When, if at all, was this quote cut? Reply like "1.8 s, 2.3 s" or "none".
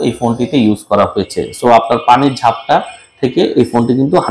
none